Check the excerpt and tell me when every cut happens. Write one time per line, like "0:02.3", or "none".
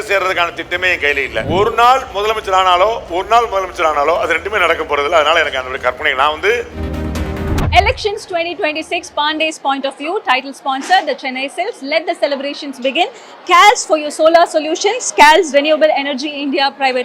0:01.4
0:07.2